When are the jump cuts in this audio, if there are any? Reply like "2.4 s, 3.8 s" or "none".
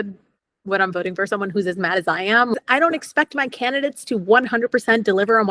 2.5 s

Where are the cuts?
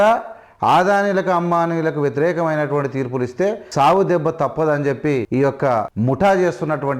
3.6 s, 5.4 s

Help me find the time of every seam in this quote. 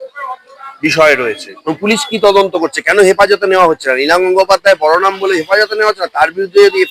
1.5 s

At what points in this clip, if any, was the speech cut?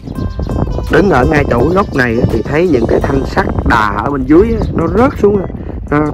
none

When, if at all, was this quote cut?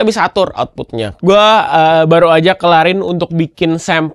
1.1 s

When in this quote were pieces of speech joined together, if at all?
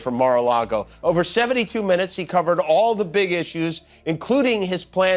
none

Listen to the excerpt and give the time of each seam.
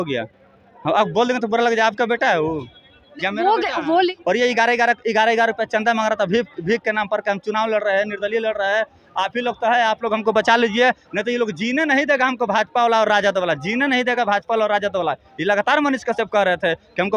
4.2 s

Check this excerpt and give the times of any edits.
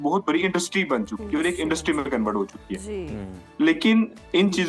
none

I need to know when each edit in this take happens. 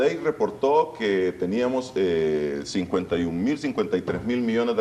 2.3 s

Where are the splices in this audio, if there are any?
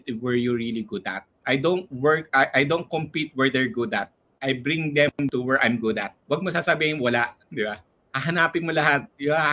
1.3 s, 6.1 s

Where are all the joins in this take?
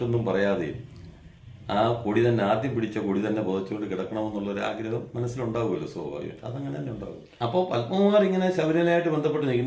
7.2 s

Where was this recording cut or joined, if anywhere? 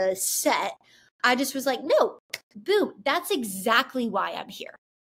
none

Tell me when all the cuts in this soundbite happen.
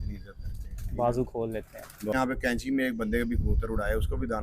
2.1 s

